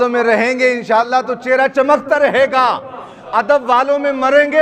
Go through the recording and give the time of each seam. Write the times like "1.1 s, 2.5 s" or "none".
none